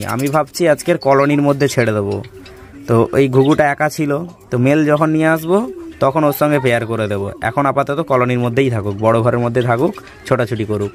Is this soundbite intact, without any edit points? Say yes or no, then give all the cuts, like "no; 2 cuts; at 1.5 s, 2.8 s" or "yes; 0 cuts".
yes; 0 cuts